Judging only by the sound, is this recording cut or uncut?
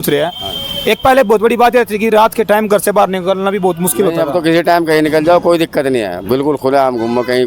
uncut